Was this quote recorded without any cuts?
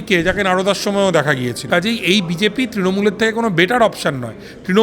no; 1 cut; at 1.6 s

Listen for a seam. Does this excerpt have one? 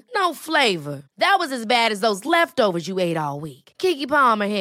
no; 0 cuts

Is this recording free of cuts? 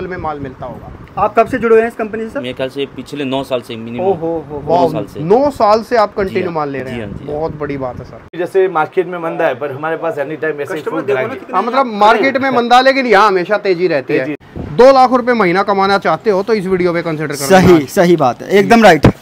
no; 2 cuts; at 8.3 s, 14.4 s

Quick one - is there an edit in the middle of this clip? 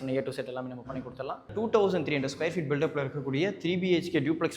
yes; 1 cut; at 1.5 s

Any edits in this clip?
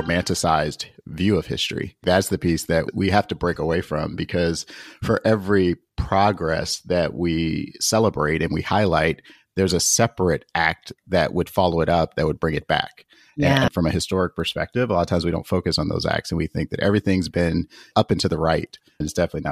yes; 2 cuts; at 2.0 s, 13.7 s

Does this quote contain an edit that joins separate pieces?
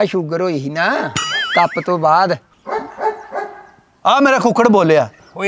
yes; 1 cut; at 2.5 s

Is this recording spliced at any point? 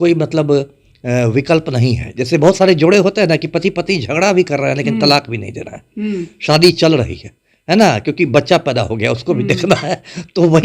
no; 0 cuts

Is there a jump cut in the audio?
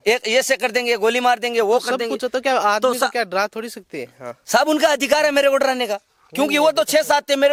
no; 0 cuts

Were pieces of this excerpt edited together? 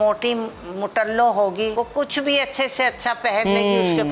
yes; 1 cut; at 1.7 s

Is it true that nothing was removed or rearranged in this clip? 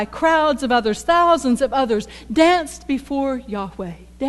no; 1 cut; at 2.3 s

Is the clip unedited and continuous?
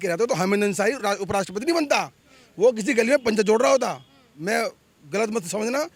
yes; 0 cuts

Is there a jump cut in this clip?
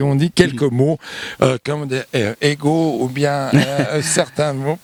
no; 0 cuts

